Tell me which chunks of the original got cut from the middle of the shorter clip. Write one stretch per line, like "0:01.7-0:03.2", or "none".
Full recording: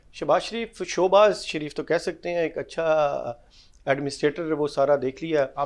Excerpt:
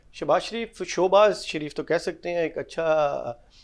none